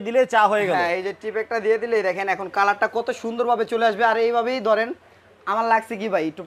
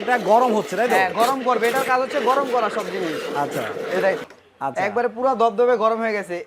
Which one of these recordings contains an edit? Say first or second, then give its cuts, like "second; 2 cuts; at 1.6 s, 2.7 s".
second; 1 cut; at 4.2 s